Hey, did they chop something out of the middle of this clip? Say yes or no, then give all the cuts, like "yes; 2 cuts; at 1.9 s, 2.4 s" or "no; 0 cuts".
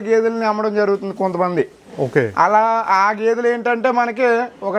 no; 0 cuts